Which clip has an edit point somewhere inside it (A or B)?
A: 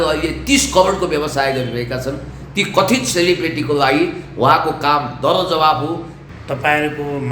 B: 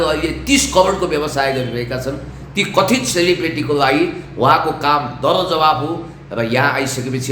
A